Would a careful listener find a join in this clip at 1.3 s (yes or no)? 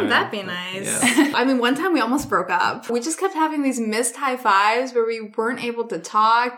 yes